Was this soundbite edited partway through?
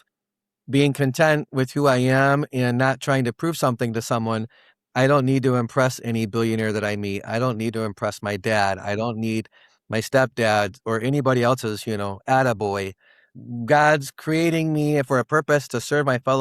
yes; 1 cut; at 13.2 s

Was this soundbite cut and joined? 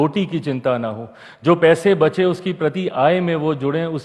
no; 0 cuts

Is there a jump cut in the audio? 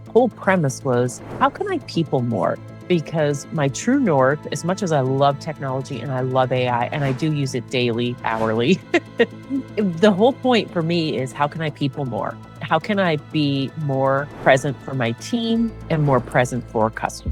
yes; 3 cuts; at 2.7 s, 9.4 s, 14.3 s

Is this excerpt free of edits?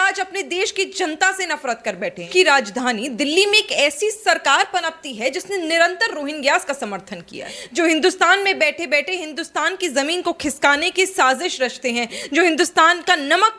no; 2 cuts; at 2.3 s, 7.6 s

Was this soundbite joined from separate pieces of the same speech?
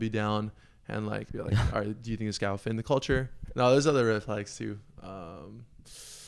yes; 1 cut; at 3.4 s

